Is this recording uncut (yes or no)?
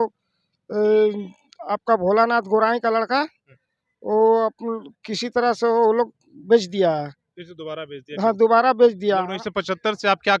yes